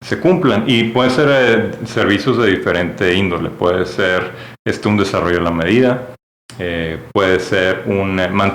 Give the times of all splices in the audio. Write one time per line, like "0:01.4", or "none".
none